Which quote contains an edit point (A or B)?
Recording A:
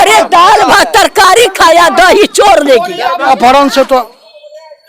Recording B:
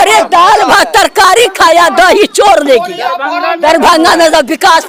A